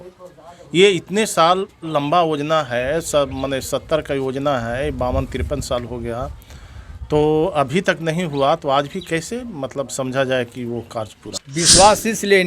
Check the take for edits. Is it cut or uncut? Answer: cut